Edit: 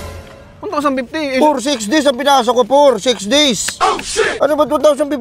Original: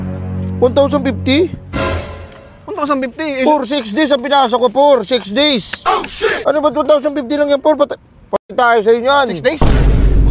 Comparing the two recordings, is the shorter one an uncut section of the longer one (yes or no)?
yes